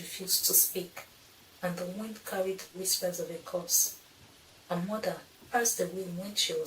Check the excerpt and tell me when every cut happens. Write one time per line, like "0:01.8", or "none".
0:05.3